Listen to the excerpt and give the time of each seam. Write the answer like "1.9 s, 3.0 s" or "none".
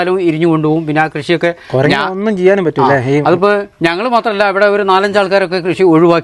none